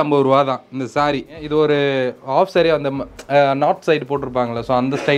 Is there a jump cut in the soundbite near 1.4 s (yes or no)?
yes